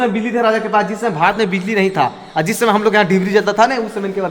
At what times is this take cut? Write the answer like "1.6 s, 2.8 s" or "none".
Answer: none